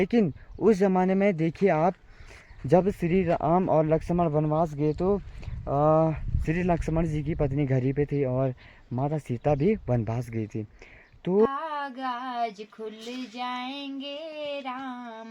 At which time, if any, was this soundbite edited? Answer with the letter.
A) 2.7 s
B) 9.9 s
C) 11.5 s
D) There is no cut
C